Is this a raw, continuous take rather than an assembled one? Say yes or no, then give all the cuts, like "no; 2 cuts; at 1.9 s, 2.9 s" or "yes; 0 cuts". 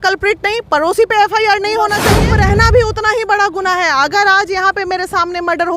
no; 1 cut; at 2.2 s